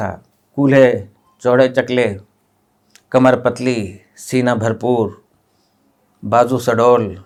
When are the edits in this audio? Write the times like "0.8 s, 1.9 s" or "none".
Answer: none